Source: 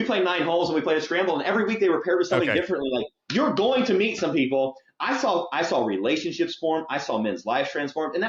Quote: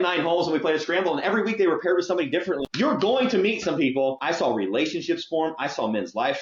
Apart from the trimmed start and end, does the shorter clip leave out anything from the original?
yes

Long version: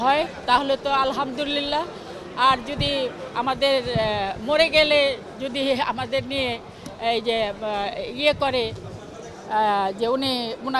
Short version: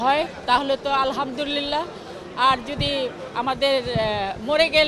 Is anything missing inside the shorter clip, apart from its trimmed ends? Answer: no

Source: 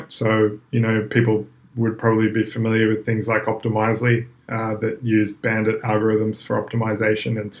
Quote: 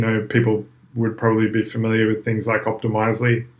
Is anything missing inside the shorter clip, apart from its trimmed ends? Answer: no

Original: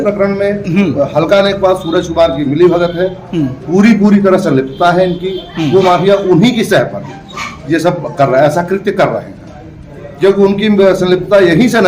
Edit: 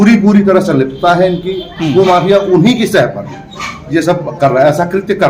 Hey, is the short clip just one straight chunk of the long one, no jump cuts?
yes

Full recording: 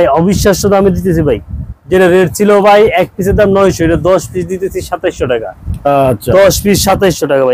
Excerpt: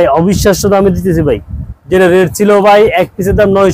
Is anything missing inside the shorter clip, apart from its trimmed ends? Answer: no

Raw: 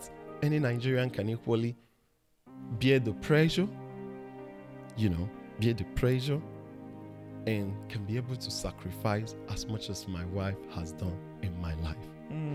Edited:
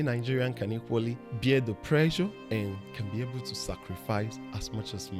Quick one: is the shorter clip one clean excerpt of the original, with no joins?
no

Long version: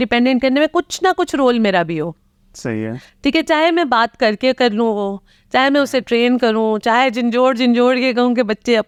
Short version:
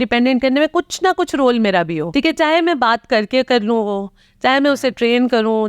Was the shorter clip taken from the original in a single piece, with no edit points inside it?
no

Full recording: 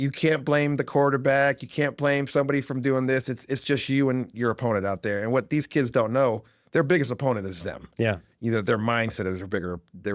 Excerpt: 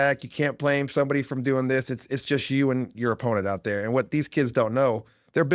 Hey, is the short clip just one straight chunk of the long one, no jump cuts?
yes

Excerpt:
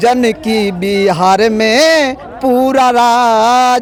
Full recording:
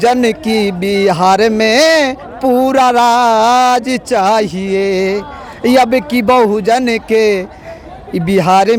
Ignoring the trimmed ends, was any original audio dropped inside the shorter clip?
no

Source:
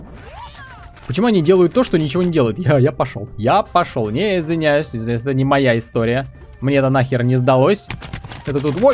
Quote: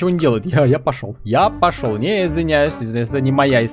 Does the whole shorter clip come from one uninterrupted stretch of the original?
yes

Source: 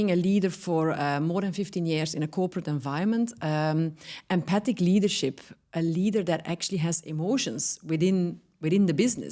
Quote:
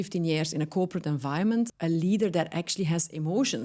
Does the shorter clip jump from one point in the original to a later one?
yes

